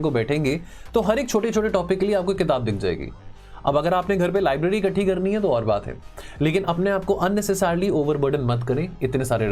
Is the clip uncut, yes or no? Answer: yes